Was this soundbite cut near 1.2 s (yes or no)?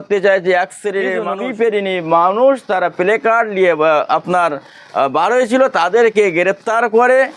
yes